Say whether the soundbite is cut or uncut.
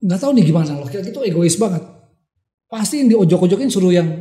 uncut